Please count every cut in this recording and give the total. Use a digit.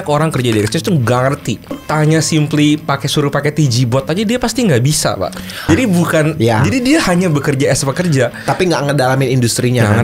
2